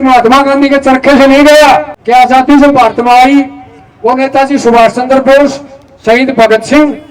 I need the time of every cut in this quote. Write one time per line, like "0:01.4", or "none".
0:01.9